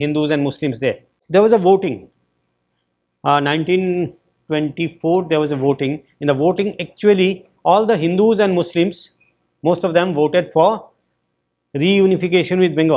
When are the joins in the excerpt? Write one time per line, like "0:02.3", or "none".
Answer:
0:01.1